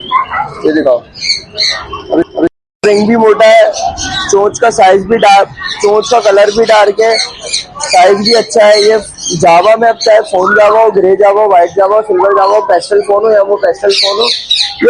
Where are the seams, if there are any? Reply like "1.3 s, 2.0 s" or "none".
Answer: none